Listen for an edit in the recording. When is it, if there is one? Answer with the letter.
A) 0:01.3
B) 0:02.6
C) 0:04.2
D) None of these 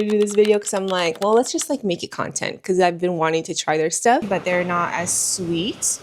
C